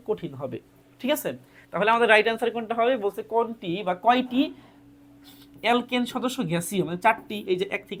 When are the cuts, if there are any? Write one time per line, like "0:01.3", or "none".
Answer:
none